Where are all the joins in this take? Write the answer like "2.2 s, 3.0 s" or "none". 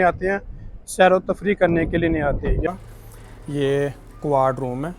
2.7 s